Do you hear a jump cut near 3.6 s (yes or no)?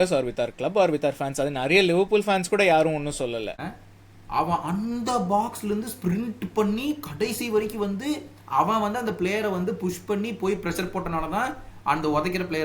yes